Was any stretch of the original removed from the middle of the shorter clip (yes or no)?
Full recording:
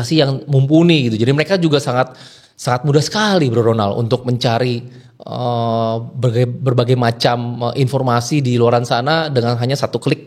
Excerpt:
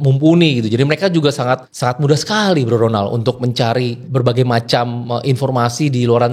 yes